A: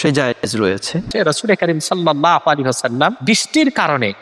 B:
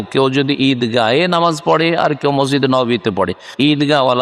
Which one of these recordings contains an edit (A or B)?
A